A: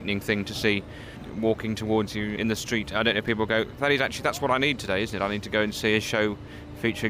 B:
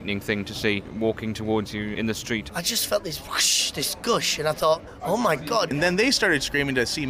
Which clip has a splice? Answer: B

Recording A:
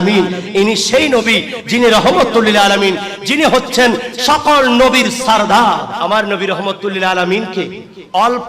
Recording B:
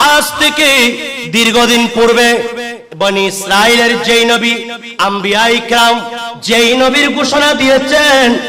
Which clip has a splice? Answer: A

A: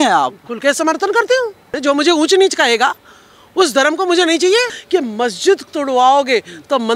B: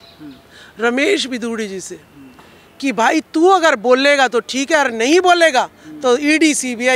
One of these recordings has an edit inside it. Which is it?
A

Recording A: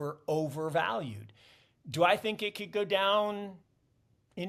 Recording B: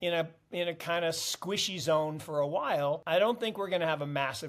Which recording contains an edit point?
B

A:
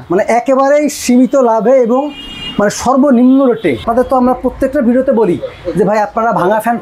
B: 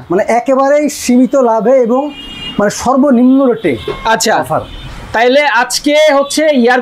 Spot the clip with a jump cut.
A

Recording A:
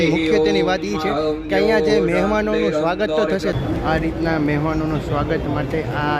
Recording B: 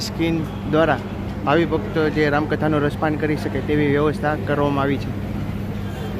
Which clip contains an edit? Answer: A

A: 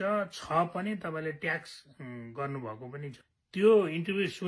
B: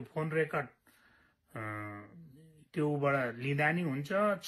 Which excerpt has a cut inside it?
A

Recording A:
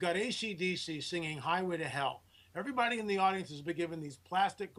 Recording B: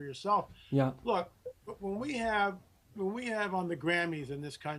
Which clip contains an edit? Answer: B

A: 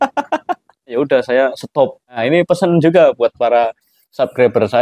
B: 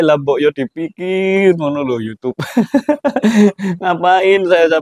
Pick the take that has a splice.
A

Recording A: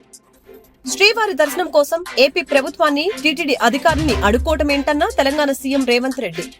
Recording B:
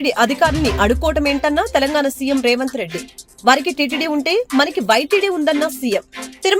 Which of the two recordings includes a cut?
A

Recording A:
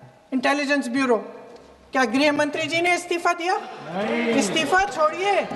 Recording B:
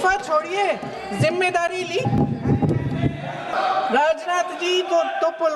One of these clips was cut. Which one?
B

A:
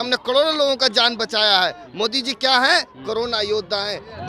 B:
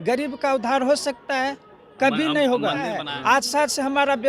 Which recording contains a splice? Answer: B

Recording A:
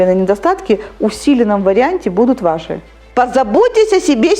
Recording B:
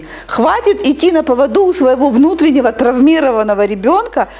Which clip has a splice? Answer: A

